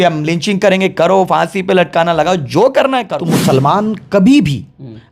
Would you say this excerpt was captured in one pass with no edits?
no; 1 cut; at 3.3 s

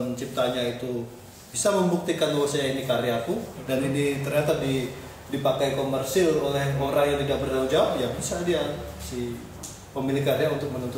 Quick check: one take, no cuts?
yes; 0 cuts

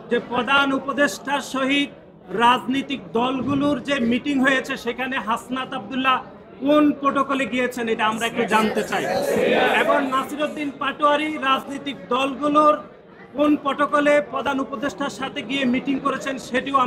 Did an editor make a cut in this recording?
no; 0 cuts

